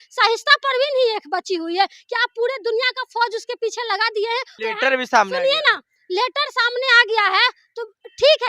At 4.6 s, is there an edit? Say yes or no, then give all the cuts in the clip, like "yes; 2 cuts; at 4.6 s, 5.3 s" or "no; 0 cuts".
yes; 1 cut; at 4.6 s